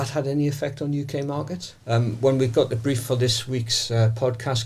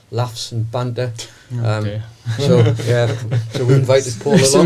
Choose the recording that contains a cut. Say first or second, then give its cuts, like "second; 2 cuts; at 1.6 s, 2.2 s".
first; 1 cut; at 1.7 s